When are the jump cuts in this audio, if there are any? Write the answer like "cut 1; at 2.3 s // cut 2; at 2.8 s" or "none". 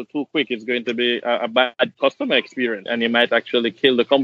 cut 1; at 1.8 s // cut 2; at 2.8 s